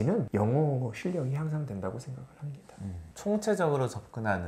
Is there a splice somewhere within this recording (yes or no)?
no